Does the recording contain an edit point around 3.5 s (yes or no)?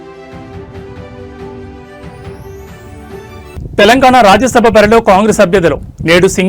yes